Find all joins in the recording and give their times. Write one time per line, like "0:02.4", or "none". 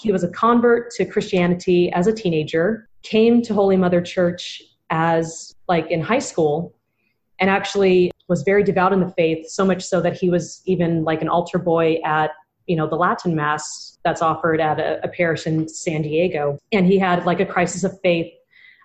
0:02.9